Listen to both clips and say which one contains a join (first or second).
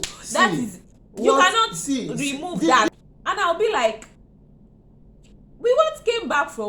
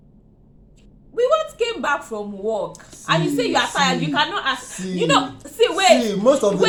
first